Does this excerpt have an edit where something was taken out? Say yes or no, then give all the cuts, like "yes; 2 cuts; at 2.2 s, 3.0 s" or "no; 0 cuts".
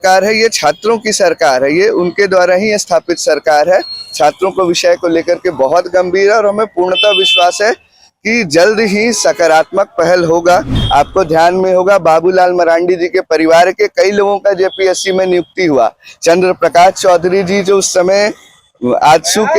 yes; 1 cut; at 10.8 s